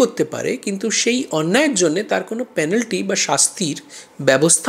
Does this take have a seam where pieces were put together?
no; 0 cuts

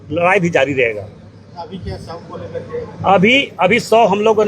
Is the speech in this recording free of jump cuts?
yes; 0 cuts

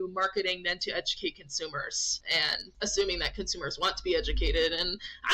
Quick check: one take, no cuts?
no; 1 cut; at 2.6 s

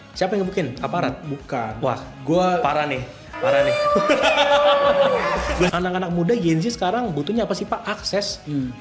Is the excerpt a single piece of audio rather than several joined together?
no; 1 cut; at 5.7 s

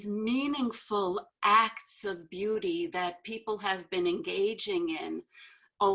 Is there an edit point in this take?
no; 0 cuts

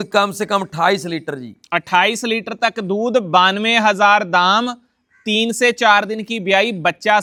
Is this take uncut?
yes; 0 cuts

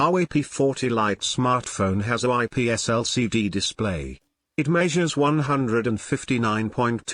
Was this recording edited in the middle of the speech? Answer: yes; 1 cut; at 1.2 s

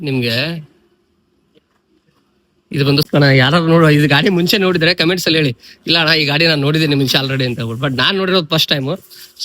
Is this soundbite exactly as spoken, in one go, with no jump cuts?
no; 1 cut; at 3.1 s

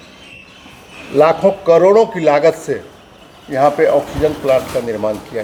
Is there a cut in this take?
no; 0 cuts

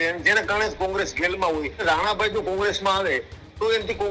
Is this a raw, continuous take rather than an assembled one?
no; 1 cut; at 1.8 s

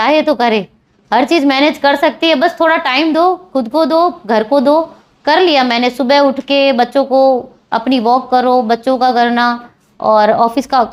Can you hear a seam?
no; 0 cuts

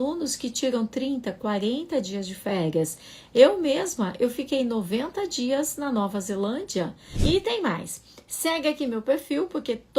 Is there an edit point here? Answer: yes; 1 cut; at 7.1 s

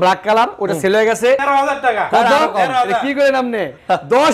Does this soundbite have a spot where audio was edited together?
yes; 1 cut; at 1.4 s

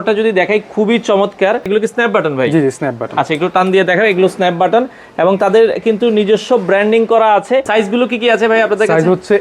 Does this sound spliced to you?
yes; 2 cuts; at 1.7 s, 7.7 s

